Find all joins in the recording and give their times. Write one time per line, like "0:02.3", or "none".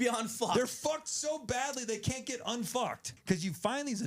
0:03.1

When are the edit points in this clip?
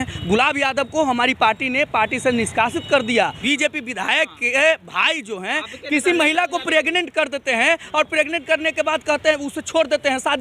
0:03.4

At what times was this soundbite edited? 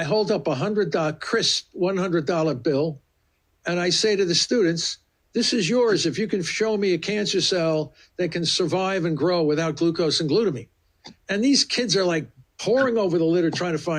none

